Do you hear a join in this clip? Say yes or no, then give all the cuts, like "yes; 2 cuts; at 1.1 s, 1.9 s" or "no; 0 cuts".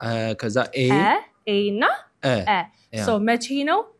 no; 0 cuts